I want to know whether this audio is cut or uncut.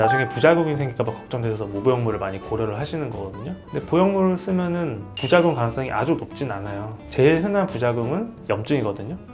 uncut